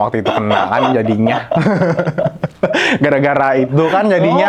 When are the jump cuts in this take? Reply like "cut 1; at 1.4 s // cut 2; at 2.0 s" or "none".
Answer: none